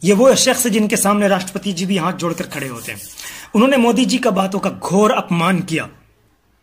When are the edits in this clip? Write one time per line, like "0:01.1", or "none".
none